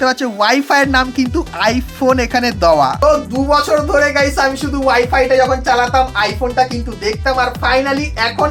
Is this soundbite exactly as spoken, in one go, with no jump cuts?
yes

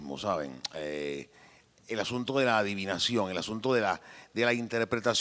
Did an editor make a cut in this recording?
no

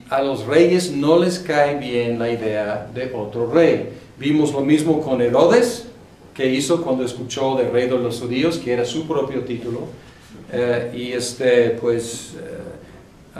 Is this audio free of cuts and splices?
yes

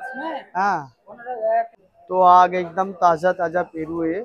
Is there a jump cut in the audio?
yes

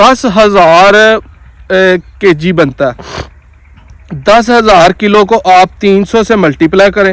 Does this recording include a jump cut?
no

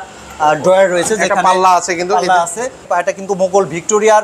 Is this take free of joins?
no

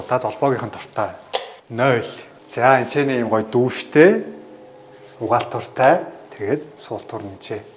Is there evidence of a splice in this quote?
no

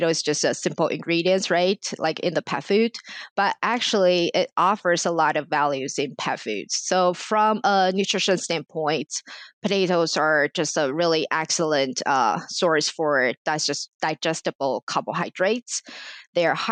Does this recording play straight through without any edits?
yes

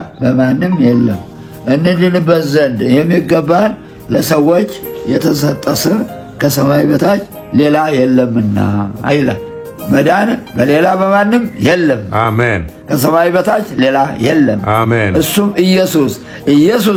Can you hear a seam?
no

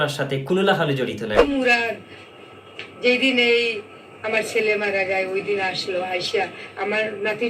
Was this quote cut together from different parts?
yes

